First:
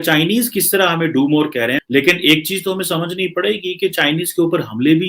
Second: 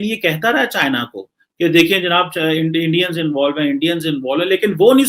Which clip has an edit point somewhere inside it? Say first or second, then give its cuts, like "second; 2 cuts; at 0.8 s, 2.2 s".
first; 1 cut; at 1.8 s